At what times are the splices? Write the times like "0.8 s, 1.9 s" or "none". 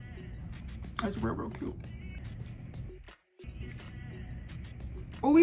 2.2 s, 3.5 s